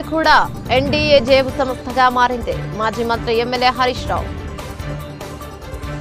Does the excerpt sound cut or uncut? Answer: uncut